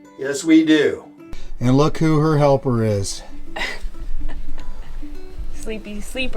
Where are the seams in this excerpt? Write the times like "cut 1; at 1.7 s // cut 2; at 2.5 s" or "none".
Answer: cut 1; at 1.2 s